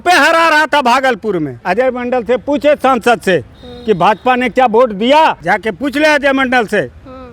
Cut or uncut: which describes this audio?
cut